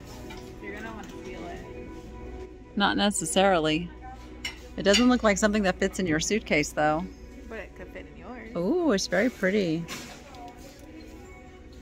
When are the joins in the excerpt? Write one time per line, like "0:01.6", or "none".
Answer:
none